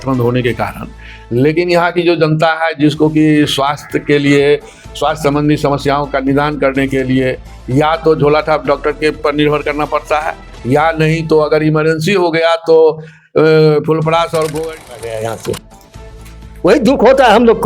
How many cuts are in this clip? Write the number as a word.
one